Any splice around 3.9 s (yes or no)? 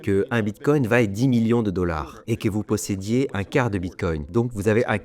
no